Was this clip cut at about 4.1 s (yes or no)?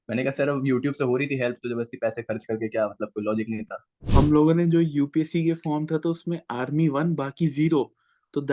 yes